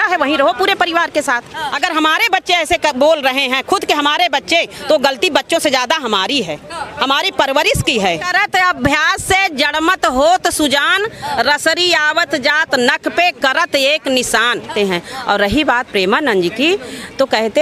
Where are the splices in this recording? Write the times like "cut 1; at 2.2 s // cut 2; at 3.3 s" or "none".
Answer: cut 1; at 1.6 s // cut 2; at 8.3 s // cut 3; at 14.7 s